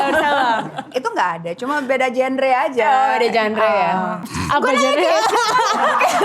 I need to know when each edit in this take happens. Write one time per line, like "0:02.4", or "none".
0:00.8
0:04.3